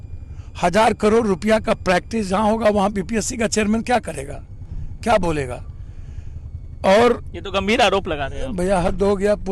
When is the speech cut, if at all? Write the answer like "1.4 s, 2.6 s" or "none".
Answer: none

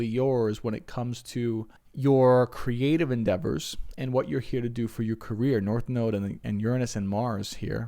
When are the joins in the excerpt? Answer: 1.8 s

